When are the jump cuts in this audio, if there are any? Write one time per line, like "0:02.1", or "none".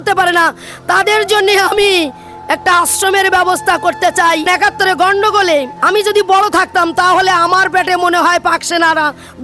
0:04.4
0:05.8